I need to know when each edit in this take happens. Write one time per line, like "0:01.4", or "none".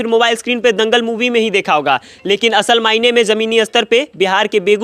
none

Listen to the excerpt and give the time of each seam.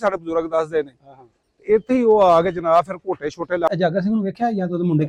0:03.7

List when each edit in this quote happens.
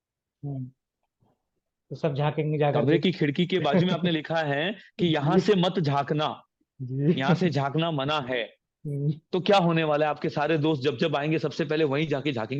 none

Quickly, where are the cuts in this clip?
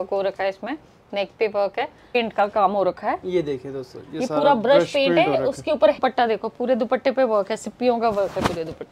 0:02.2
0:06.0

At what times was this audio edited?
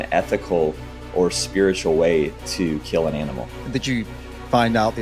0:03.5

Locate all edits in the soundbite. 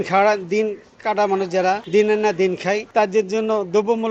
0:01.8
0:02.8

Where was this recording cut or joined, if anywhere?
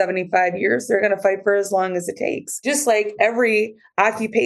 0:02.5

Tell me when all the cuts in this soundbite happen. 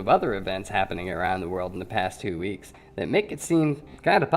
0:02.5

